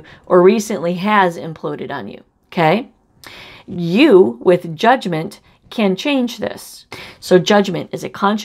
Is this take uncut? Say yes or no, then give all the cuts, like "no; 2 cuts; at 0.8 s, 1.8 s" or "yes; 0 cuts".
no; 1 cut; at 6.9 s